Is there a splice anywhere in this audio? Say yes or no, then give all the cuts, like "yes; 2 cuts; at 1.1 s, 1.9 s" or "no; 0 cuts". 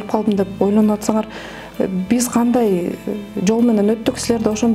no; 0 cuts